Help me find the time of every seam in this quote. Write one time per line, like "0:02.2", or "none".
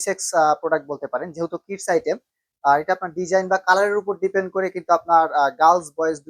none